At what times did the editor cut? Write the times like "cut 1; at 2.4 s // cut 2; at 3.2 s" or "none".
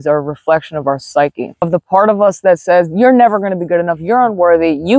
cut 1; at 1.7 s